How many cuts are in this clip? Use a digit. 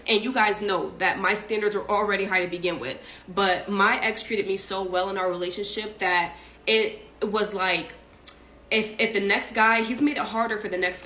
0